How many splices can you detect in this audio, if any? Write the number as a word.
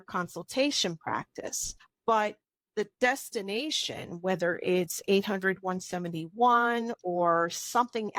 zero